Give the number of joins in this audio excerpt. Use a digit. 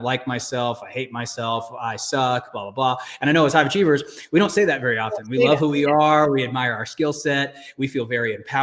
0